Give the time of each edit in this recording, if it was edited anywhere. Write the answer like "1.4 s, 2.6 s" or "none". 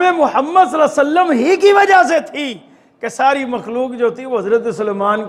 none